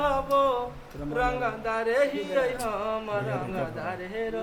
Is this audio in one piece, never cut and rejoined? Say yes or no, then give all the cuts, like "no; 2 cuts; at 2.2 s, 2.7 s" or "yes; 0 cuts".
yes; 0 cuts